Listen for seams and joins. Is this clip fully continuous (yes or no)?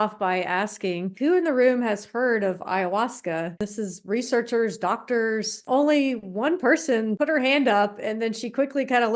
no